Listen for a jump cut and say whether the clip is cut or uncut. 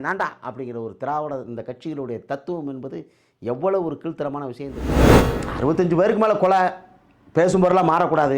cut